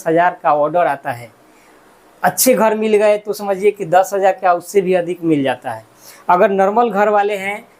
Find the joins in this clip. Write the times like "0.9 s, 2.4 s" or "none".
none